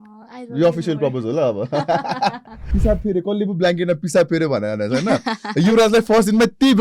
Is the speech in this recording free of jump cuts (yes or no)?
no